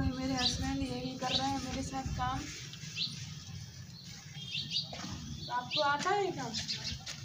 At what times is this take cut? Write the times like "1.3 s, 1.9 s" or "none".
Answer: none